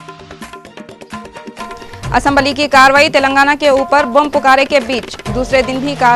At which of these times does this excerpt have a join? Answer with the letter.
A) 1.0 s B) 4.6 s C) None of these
A